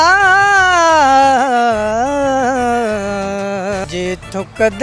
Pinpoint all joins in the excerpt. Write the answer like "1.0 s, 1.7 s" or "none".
3.8 s